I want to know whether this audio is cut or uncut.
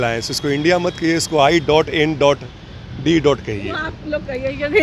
uncut